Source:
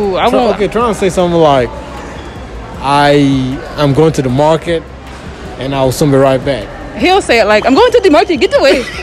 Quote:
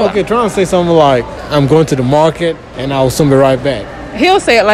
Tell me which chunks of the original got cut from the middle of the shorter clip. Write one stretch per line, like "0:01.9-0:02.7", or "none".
0:01.8-0:03.6
0:05.0-0:05.5